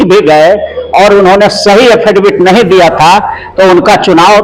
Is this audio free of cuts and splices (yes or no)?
yes